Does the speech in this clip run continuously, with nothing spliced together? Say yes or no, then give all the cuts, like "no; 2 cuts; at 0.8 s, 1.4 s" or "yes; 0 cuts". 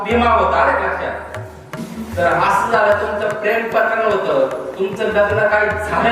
no; 1 cut; at 1.8 s